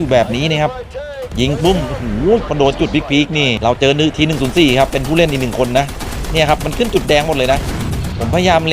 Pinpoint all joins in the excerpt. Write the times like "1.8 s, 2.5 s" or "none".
3.5 s